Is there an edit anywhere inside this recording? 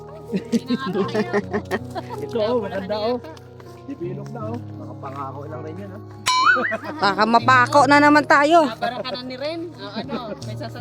no; 0 cuts

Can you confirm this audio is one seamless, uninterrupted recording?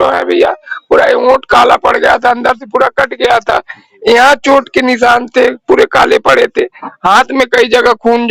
yes; 0 cuts

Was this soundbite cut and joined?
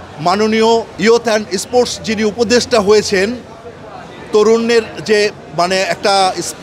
yes; 1 cut; at 0.9 s

